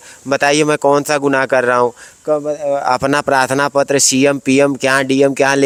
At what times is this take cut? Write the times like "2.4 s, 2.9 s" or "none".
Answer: none